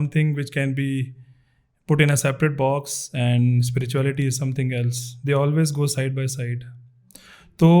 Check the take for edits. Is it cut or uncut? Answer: uncut